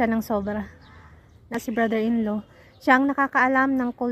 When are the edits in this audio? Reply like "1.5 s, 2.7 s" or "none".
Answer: 1.5 s